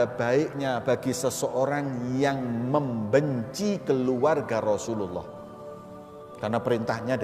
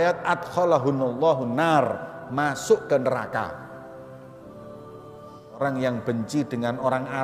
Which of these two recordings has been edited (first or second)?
second